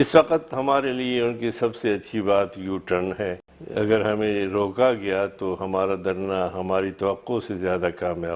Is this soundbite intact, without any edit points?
no; 1 cut; at 3.5 s

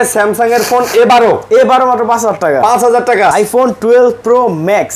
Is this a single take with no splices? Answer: no; 1 cut; at 3.3 s

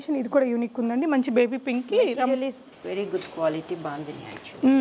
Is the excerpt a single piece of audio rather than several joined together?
yes; 0 cuts

